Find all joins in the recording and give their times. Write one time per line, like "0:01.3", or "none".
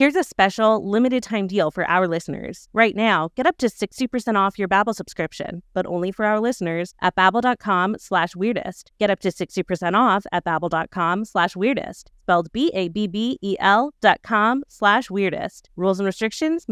none